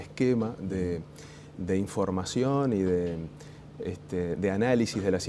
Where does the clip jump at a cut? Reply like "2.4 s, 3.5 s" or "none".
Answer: none